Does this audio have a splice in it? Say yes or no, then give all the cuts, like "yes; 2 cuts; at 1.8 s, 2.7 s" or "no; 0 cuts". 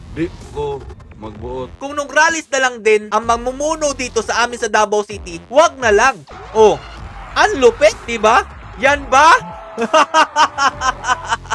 yes; 3 cuts; at 1.8 s, 6.2 s, 8.6 s